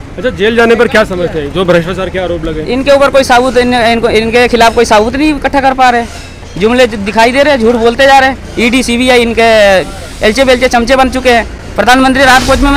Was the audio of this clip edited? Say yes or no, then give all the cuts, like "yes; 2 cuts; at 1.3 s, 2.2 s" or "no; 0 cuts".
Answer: yes; 1 cut; at 11.6 s